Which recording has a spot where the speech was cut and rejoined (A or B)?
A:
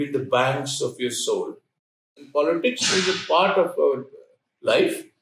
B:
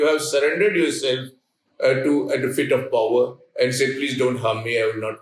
A